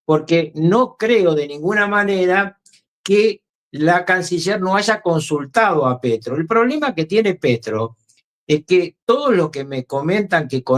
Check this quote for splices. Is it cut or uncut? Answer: uncut